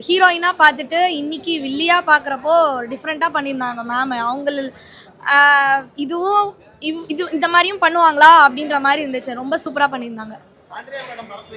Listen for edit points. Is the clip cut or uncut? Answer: uncut